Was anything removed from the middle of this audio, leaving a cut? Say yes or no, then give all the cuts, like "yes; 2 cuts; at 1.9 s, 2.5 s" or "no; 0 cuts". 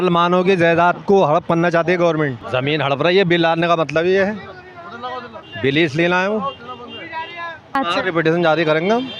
yes; 2 cuts; at 2.4 s, 7.8 s